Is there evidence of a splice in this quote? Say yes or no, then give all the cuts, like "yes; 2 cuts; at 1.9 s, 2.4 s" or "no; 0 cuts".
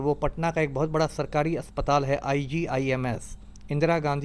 no; 0 cuts